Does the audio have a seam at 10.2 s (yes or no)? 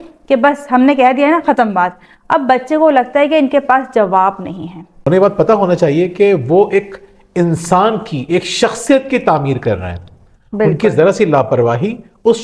no